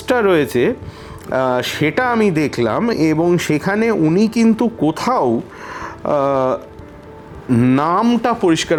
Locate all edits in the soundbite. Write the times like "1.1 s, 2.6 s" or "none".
none